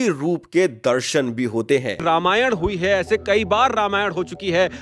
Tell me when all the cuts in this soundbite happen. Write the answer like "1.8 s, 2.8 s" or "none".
2.0 s